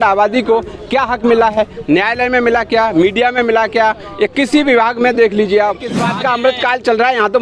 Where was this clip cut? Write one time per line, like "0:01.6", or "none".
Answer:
0:06.0

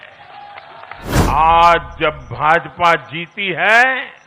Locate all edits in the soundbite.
0:01.1

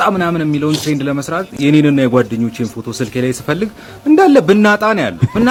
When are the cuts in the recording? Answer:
none

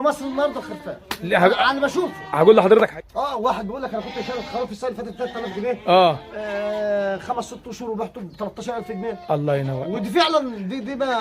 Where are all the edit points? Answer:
0:03.0

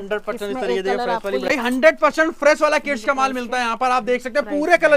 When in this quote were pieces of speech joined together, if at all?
0:01.5

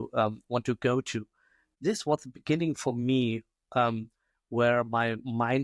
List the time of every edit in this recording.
0:01.7

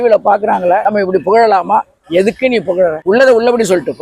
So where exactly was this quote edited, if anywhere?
0:00.8
0:03.0

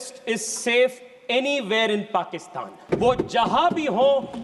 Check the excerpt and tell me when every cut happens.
0:02.8

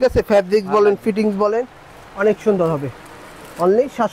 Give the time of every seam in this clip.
none

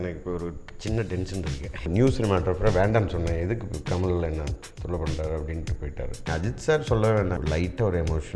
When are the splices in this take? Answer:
0:01.9
0:06.2
0:07.4

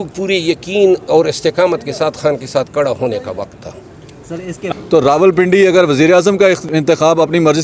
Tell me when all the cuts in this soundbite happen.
0:04.7
0:06.7

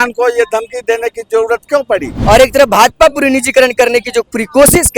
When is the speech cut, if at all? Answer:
0:02.1

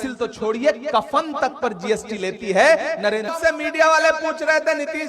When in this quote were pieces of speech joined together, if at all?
0:03.3

